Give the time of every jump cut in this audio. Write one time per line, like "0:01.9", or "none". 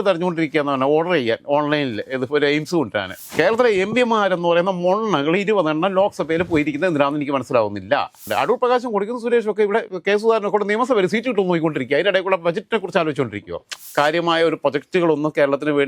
0:03.2
0:08.3
0:13.7